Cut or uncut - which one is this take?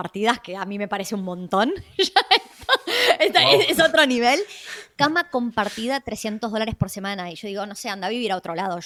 uncut